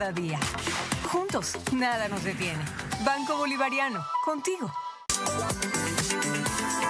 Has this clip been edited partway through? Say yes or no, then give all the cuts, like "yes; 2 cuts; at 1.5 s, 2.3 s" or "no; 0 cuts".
yes; 1 cut; at 5.0 s